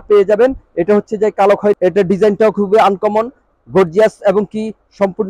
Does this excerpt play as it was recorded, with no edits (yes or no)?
no